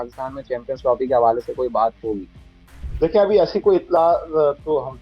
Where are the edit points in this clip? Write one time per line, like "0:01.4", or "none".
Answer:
none